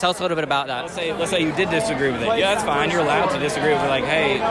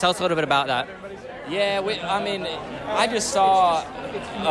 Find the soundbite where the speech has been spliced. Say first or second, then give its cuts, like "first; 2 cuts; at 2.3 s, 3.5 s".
first; 1 cut; at 1.0 s